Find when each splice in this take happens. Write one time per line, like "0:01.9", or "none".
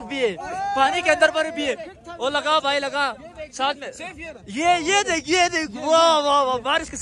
none